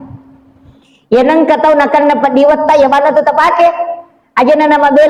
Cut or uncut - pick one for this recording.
uncut